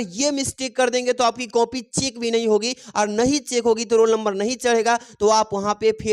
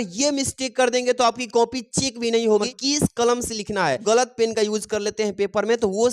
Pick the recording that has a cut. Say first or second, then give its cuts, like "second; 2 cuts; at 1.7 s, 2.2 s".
second; 2 cuts; at 2.7 s, 4.0 s